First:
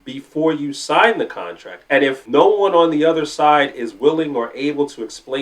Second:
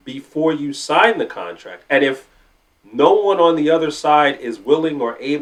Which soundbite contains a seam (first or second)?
first